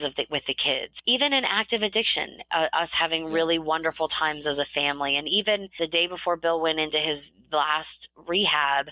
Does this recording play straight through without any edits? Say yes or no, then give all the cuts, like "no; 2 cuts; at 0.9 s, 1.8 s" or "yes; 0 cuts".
no; 2 cuts; at 0.9 s, 5.7 s